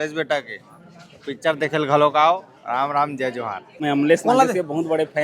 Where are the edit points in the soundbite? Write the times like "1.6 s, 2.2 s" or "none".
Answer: 3.8 s